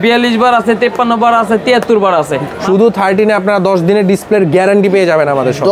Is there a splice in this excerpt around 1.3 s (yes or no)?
no